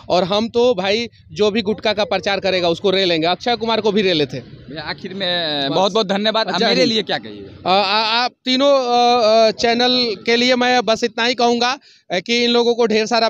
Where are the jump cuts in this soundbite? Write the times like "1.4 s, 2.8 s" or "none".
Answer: none